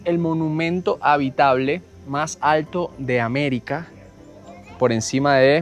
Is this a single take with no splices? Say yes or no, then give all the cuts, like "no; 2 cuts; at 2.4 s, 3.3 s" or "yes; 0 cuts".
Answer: yes; 0 cuts